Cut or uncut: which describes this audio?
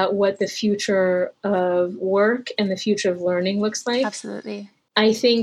uncut